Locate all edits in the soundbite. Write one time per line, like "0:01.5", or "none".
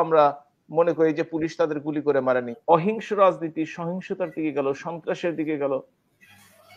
0:02.6